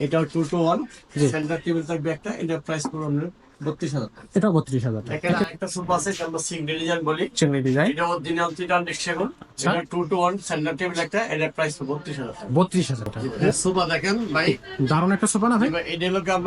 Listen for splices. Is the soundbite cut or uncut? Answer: cut